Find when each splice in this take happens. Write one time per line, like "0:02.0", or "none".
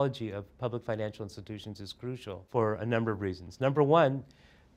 0:02.5